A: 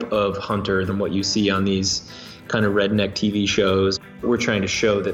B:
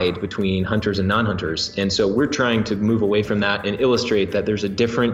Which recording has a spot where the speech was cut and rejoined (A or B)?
A